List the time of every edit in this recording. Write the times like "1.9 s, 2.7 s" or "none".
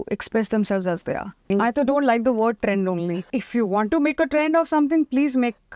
1.5 s, 3.2 s